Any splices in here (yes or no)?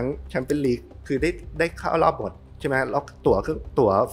no